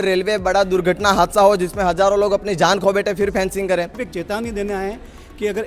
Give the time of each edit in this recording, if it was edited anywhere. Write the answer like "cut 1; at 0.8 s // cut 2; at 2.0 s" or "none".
cut 1; at 4.0 s